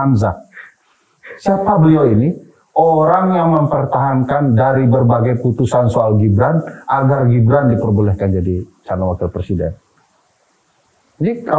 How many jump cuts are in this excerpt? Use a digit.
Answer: 0